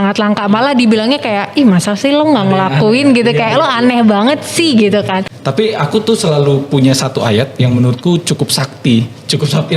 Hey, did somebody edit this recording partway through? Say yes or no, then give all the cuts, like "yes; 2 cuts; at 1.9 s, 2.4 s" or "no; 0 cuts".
yes; 1 cut; at 5.4 s